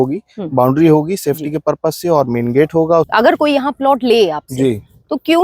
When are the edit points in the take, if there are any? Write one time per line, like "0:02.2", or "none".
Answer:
0:03.1